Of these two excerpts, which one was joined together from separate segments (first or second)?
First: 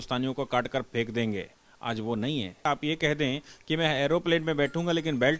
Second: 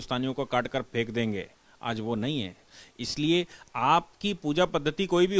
first